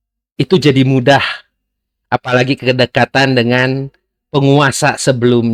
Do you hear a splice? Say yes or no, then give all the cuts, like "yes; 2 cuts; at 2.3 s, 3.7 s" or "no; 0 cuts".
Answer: no; 0 cuts